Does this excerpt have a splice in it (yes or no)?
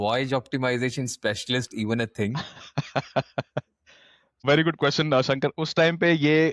no